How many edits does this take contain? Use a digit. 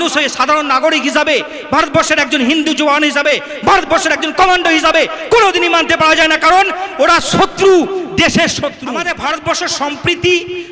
1